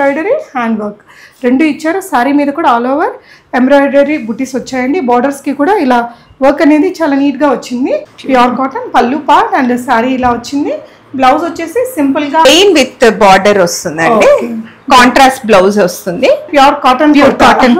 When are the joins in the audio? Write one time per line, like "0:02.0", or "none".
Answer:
0:08.1
0:12.5
0:16.5